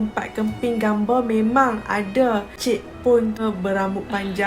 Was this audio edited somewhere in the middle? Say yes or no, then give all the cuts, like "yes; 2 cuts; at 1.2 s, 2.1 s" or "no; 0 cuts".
yes; 1 cut; at 2.5 s